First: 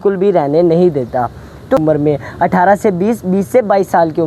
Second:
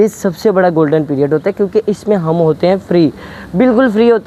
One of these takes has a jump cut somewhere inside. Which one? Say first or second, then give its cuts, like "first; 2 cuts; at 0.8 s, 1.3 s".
first; 1 cut; at 1.8 s